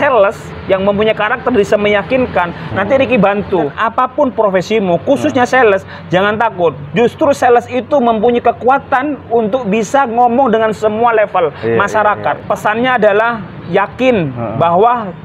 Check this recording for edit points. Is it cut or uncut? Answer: cut